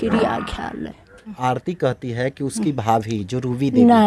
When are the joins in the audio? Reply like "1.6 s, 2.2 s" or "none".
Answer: 1.4 s